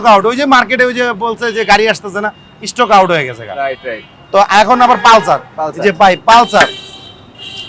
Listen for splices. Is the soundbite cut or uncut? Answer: uncut